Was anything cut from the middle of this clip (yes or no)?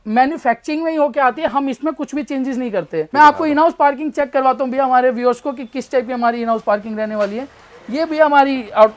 yes